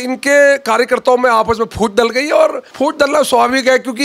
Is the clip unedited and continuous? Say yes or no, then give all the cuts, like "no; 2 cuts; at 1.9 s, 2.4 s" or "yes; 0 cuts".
no; 1 cut; at 2.6 s